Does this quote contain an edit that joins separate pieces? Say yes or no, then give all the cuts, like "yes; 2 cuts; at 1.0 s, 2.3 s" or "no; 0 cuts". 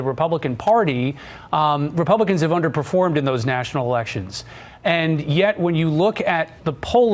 no; 0 cuts